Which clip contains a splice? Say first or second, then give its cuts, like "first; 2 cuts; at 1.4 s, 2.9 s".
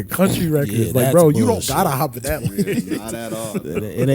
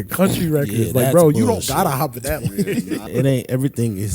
second; 1 cut; at 3.1 s